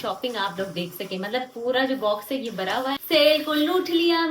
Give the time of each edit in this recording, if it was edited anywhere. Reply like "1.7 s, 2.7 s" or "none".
3.0 s